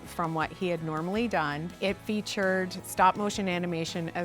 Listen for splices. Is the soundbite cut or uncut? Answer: cut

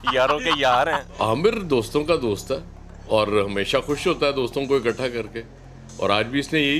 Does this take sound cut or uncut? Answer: cut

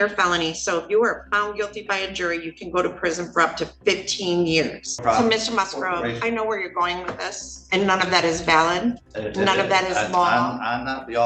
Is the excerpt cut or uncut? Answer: cut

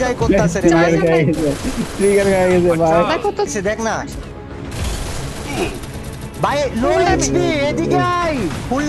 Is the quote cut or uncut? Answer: cut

